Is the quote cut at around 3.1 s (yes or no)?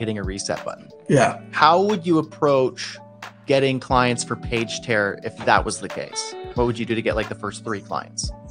no